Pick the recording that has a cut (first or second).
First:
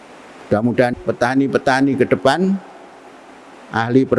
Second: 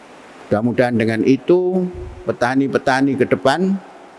first